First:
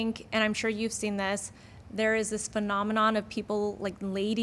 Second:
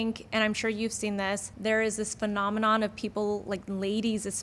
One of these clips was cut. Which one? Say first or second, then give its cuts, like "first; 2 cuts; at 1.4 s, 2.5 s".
second; 1 cut; at 1.5 s